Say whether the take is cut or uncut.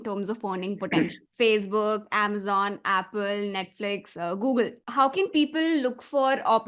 cut